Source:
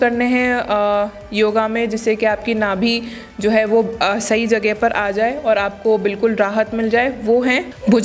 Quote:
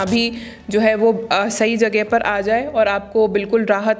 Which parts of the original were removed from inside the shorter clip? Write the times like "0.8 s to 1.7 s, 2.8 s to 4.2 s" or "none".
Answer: none